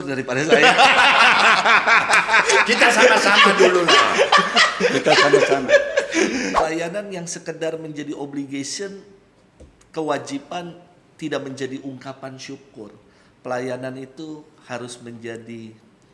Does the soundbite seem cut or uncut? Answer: cut